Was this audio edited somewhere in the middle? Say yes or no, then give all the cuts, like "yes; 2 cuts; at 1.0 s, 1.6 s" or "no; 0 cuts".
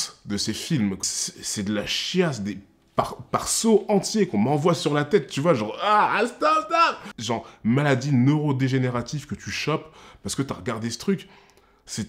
yes; 2 cuts; at 1.0 s, 7.1 s